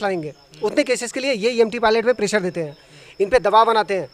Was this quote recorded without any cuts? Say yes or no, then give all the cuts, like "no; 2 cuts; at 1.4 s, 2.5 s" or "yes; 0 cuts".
yes; 0 cuts